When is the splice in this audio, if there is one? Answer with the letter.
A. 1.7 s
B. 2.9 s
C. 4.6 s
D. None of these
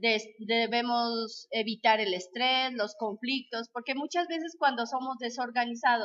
B